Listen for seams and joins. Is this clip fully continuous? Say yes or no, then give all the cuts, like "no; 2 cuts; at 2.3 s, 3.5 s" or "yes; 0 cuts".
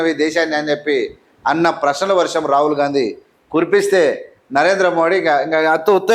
yes; 0 cuts